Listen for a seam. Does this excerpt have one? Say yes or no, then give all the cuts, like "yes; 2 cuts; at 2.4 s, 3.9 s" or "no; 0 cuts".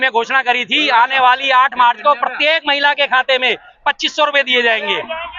no; 0 cuts